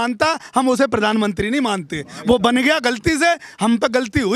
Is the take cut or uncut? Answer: uncut